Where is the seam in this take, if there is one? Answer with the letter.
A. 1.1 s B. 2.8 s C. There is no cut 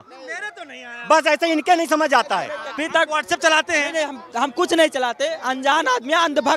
B